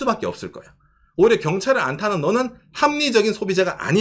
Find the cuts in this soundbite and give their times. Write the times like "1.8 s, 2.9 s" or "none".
none